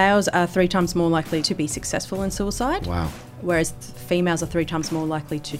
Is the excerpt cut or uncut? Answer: cut